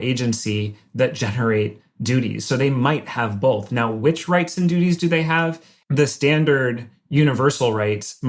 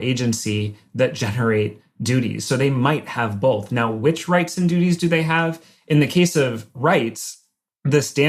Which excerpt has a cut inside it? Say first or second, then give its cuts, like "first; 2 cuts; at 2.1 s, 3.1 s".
first; 1 cut; at 5.7 s